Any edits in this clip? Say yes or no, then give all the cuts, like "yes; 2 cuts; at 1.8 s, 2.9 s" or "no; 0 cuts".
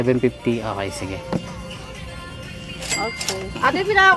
no; 0 cuts